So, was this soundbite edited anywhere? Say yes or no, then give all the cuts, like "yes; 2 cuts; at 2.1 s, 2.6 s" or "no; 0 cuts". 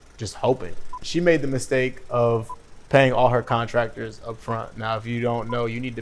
yes; 1 cut; at 1.0 s